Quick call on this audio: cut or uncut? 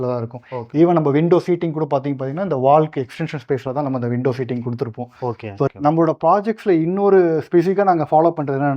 cut